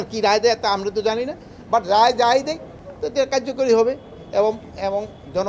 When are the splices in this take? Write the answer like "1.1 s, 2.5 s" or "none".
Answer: none

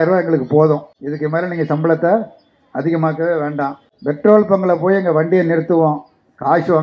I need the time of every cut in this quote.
1.0 s, 3.9 s

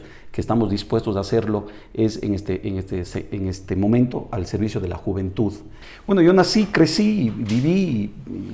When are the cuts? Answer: 5.8 s

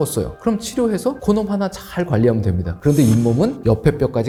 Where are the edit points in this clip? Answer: none

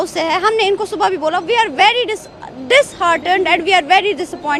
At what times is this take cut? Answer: none

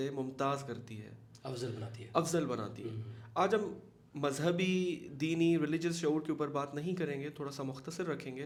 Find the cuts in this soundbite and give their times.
none

